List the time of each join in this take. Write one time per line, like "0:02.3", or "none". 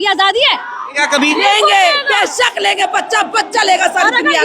0:01.0